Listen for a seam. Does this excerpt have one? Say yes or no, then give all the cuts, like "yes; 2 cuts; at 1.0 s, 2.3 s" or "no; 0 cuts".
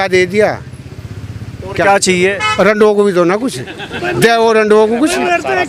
no; 0 cuts